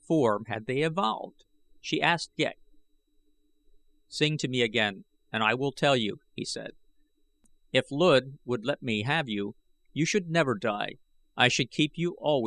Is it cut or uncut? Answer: cut